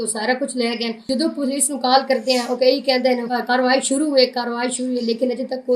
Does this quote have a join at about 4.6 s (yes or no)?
no